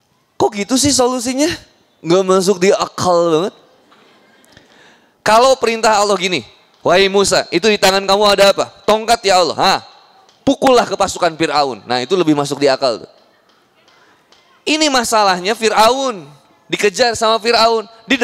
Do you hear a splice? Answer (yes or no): no